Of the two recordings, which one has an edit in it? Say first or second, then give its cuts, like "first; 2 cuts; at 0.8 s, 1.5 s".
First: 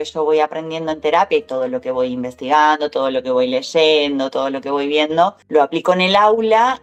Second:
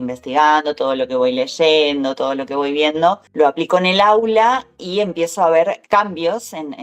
second; 1 cut; at 5.8 s